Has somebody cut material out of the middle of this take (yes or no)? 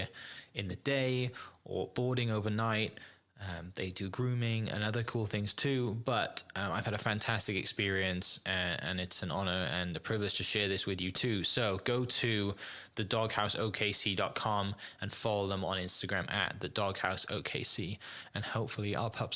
no